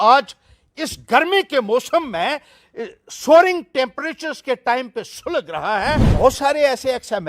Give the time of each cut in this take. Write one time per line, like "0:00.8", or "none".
0:06.1